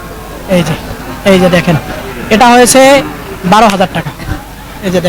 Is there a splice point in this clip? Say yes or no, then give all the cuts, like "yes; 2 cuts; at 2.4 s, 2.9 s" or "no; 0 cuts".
no; 0 cuts